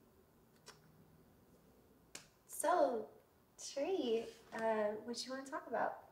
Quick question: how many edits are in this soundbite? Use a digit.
0